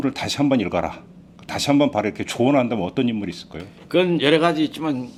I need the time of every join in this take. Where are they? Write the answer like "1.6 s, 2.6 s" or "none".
none